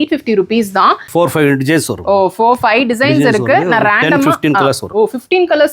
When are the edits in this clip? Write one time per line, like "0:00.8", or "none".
0:01.0